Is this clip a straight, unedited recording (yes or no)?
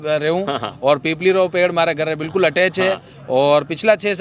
yes